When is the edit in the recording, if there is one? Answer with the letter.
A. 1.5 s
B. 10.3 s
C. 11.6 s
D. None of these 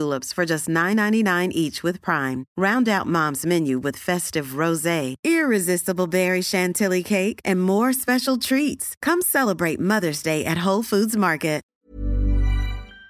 C